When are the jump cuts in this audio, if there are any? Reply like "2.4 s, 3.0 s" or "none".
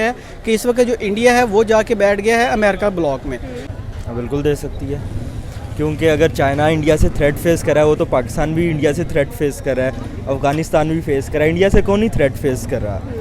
3.7 s